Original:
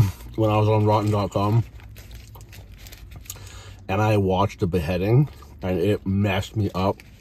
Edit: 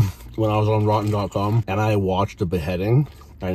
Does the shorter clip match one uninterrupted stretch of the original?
no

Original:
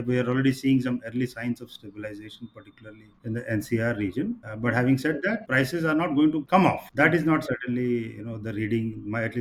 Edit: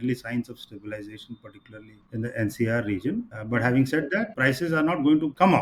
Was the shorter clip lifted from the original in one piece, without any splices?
yes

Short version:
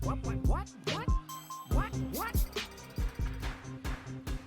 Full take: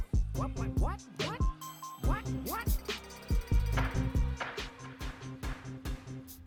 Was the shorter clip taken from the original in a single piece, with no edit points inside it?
no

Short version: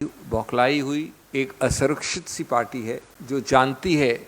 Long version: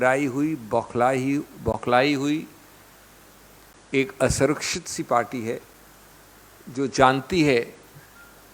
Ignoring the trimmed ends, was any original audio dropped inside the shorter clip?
yes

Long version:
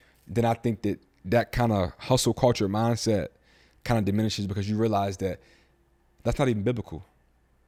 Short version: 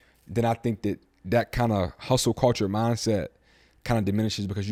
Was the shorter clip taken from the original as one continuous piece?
yes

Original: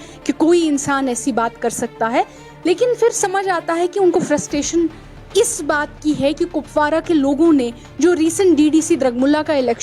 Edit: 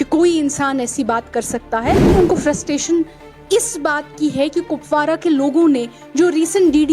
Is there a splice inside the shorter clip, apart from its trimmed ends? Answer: yes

